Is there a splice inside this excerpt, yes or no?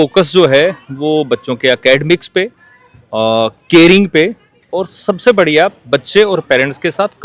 no